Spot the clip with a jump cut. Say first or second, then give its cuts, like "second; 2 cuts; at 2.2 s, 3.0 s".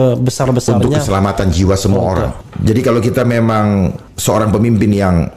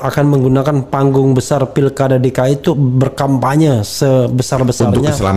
first; 2 cuts; at 2.4 s, 4.1 s